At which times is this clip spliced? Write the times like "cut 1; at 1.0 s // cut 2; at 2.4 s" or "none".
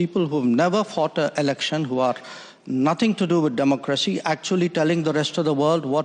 none